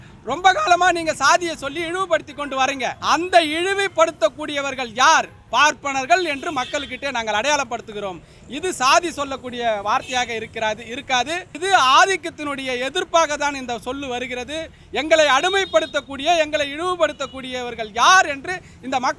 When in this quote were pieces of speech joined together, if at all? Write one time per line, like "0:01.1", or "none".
0:03.0
0:11.5